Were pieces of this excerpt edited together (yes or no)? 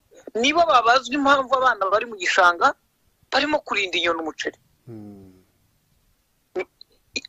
no